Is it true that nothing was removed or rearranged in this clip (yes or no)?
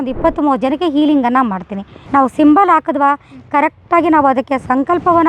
no